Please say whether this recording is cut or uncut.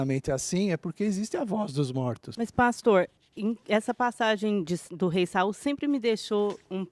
cut